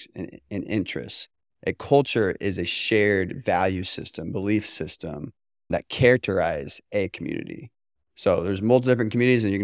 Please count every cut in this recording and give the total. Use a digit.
1